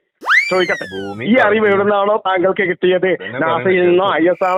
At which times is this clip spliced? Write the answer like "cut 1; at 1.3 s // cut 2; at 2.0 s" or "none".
none